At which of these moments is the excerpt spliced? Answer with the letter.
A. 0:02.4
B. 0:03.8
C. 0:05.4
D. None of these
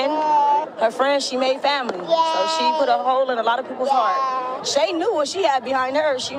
D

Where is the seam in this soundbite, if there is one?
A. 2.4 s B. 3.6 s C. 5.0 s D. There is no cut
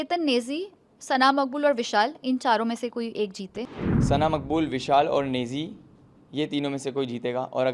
B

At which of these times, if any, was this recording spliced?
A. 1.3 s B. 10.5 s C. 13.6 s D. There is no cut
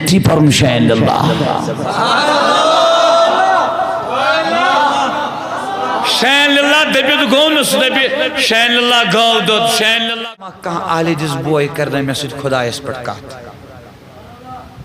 B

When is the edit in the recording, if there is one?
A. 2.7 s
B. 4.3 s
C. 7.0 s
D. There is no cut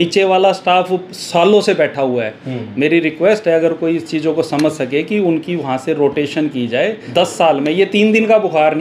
C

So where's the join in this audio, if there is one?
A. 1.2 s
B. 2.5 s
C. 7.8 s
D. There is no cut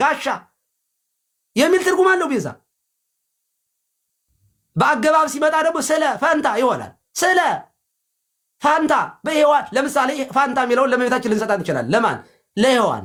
D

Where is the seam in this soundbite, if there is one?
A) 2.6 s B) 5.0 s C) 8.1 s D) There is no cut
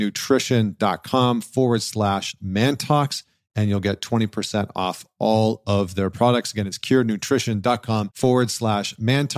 C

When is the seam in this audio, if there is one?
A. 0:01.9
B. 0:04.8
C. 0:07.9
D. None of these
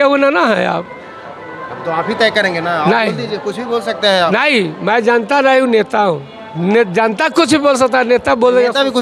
D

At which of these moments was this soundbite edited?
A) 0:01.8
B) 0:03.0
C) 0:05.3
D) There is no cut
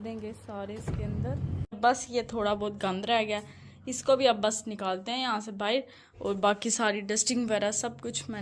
A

